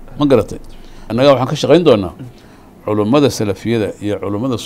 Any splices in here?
yes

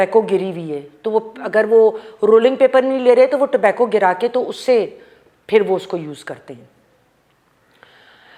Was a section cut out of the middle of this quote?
no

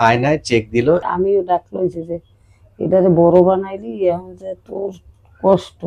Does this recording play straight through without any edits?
no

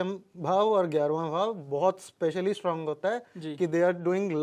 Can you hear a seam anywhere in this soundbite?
no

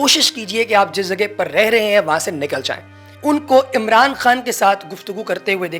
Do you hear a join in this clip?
yes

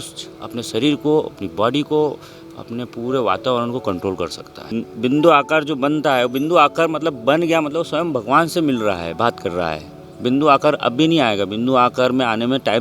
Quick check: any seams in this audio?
yes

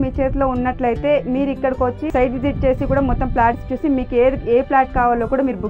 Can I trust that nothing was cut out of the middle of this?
no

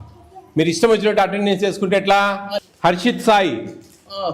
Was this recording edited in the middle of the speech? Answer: yes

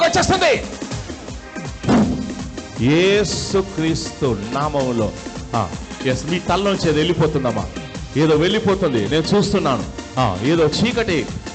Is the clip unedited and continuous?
yes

